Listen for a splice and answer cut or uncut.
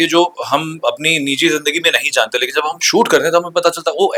uncut